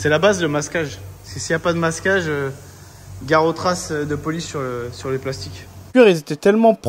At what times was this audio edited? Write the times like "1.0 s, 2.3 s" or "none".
5.9 s